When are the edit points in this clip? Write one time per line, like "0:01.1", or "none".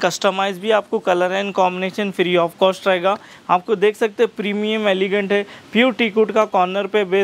none